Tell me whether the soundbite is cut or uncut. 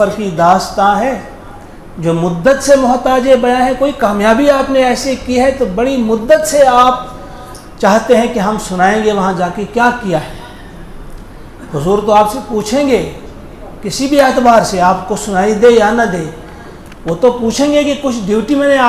uncut